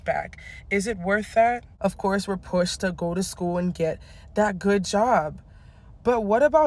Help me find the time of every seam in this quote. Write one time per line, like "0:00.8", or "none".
0:01.7